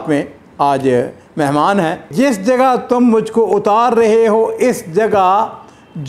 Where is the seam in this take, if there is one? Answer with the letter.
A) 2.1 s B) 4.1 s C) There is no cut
A